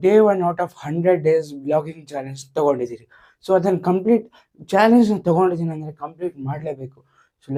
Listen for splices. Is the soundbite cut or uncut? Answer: uncut